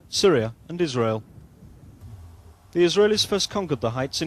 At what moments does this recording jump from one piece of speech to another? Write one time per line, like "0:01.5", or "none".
0:01.5